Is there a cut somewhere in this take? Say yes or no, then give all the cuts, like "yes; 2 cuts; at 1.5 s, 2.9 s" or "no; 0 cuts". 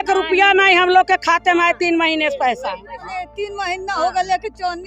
yes; 1 cut; at 3.0 s